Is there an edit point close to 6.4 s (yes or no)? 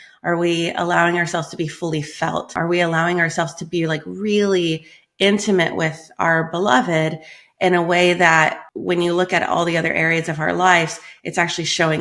no